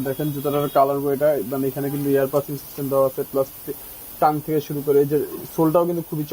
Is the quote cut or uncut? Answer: uncut